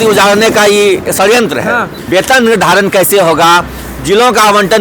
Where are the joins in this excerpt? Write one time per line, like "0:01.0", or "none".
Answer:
0:02.0